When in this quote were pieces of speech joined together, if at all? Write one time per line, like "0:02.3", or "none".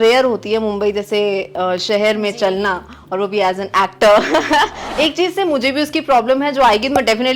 0:04.9